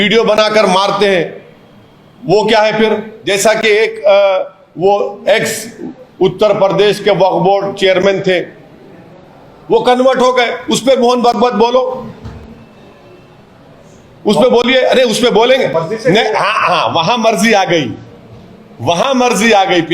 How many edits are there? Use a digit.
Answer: 1